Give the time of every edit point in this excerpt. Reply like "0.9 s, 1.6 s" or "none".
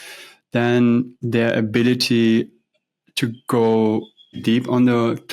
4.4 s